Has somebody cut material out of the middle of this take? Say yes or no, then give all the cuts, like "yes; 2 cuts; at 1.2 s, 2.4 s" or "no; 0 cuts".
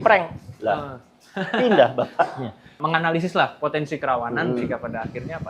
yes; 1 cut; at 2.8 s